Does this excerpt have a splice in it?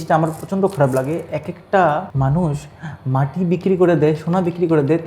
yes; 1 cut; at 2.1 s

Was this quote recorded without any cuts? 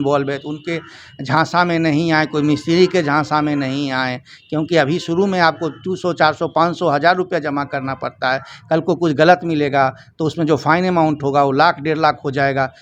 yes; 0 cuts

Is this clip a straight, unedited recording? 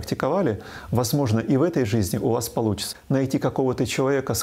no; 1 cut; at 2.9 s

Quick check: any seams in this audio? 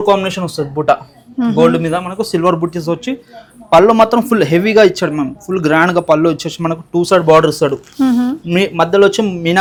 no; 0 cuts

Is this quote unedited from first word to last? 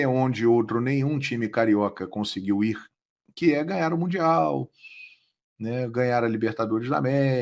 yes; 0 cuts

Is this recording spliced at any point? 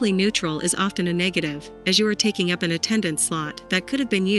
no; 0 cuts

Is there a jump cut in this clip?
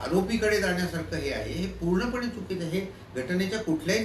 no; 0 cuts

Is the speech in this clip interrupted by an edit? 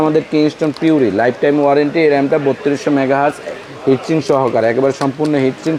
no; 0 cuts

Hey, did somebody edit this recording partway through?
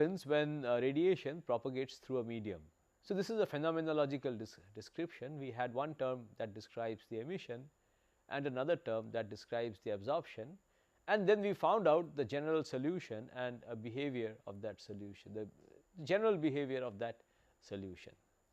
yes; 1 cut; at 16.8 s

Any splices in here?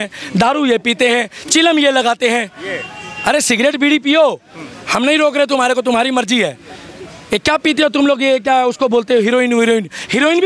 no; 0 cuts

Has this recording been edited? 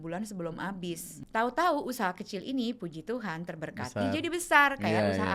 yes; 1 cut; at 1.1 s

